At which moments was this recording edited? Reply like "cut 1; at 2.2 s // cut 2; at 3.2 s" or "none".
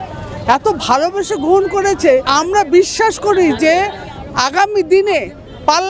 cut 1; at 2.3 s